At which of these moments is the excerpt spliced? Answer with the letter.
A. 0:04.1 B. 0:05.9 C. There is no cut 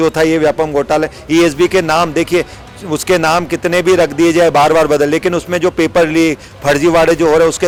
C